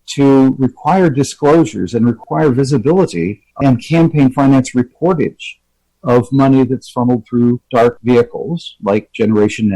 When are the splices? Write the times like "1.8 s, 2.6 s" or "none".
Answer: 2.2 s, 3.4 s